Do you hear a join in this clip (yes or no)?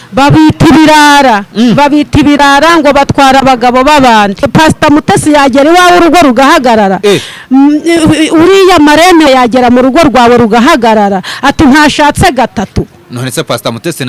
yes